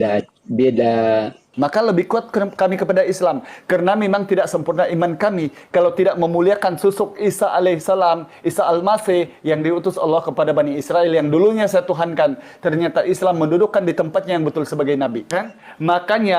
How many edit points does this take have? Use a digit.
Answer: 2